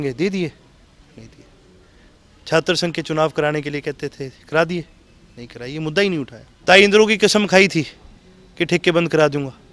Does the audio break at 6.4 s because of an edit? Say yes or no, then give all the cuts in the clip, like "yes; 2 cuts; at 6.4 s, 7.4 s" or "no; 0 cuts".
yes; 1 cut; at 6.4 s